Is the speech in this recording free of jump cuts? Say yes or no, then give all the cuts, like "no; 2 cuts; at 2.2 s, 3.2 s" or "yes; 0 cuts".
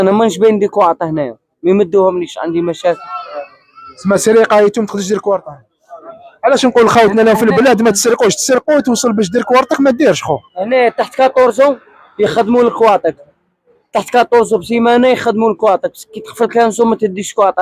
yes; 0 cuts